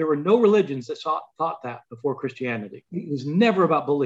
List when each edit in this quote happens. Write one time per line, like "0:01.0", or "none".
0:02.8